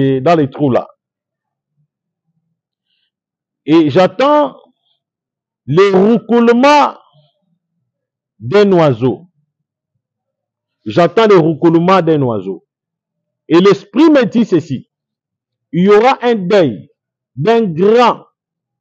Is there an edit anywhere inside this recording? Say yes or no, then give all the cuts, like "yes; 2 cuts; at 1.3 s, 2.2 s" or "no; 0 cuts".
no; 0 cuts